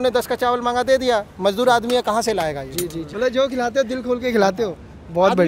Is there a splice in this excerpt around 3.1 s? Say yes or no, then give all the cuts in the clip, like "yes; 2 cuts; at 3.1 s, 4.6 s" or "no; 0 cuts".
yes; 1 cut; at 3.1 s